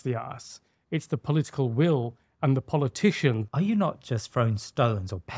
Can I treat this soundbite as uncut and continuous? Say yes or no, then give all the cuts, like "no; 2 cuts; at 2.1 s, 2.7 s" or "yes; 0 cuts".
no; 1 cut; at 3.4 s